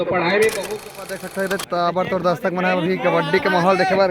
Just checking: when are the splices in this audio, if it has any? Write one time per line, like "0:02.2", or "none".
0:01.2